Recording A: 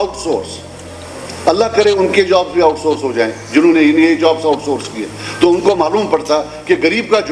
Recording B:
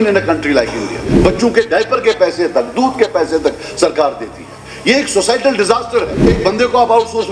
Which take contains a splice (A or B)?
B